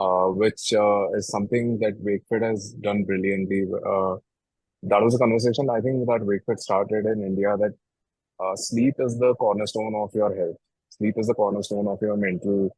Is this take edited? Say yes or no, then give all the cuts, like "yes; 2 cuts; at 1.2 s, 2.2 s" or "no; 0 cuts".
yes; 1 cut; at 4.5 s